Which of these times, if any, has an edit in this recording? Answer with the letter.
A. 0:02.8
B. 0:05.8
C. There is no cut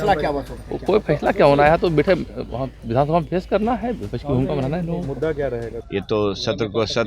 B